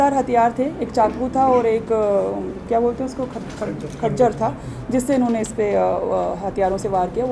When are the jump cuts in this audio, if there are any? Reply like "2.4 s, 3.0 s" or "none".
none